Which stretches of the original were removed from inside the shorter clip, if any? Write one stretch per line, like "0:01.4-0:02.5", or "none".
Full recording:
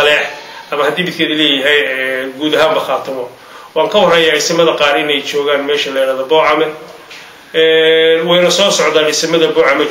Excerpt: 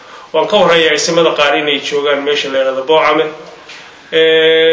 none